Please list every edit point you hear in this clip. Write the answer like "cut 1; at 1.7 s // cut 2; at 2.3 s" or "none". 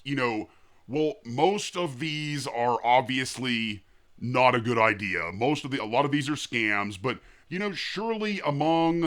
none